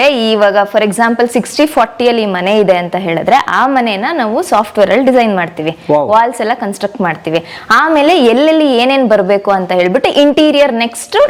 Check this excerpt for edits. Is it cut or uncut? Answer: uncut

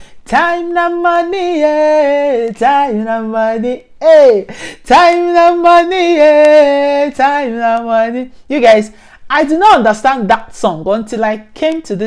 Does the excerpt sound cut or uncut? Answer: uncut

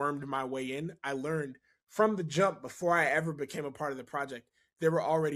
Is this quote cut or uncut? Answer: uncut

